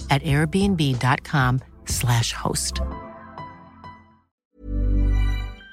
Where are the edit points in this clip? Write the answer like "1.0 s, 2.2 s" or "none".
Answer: 4.3 s